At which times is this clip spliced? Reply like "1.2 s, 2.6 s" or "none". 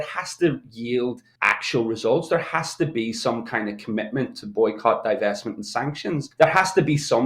1.3 s, 6.3 s